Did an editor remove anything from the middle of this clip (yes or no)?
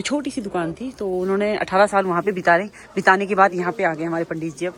no